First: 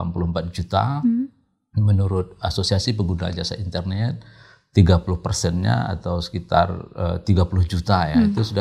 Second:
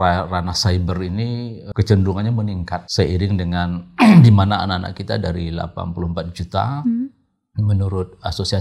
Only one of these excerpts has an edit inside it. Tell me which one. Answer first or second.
second